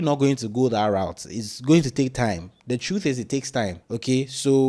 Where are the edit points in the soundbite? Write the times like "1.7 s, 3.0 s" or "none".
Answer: none